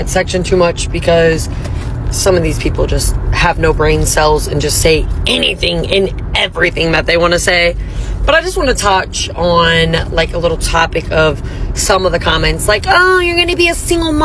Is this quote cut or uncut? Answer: uncut